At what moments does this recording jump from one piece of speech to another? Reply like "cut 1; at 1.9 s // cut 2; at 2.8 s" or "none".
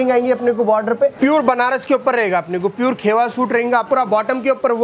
cut 1; at 1.2 s // cut 2; at 3.9 s